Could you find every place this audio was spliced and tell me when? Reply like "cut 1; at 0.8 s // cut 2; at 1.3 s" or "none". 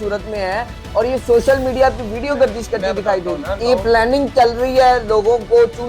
cut 1; at 3.5 s